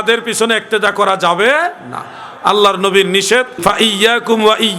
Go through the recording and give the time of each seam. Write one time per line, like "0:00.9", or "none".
0:03.6